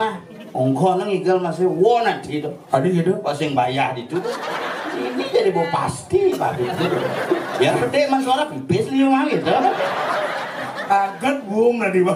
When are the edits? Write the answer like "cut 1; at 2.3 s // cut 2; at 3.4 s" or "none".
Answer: cut 1; at 4.7 s